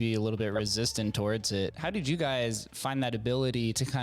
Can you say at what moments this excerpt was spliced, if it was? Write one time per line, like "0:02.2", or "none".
0:01.8